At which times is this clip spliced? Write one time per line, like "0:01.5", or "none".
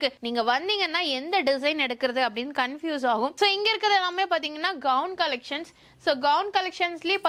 none